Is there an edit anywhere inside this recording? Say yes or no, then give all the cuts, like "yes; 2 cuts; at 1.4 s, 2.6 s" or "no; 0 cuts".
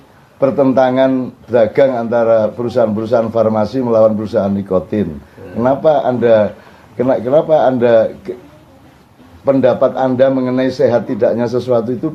no; 0 cuts